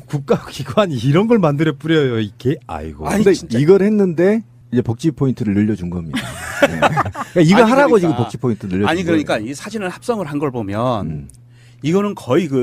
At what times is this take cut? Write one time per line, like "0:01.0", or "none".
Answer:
0:11.0